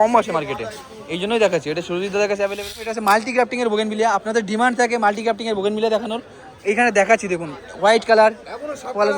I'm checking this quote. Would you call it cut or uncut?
cut